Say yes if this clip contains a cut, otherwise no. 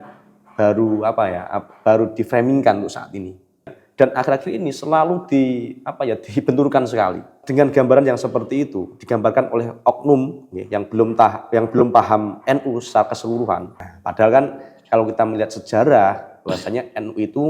yes